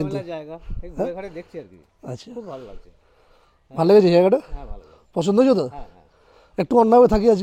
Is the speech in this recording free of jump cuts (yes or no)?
yes